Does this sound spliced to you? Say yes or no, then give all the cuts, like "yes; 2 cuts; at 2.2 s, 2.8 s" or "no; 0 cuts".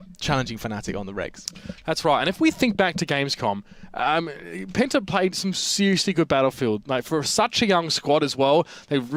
no; 0 cuts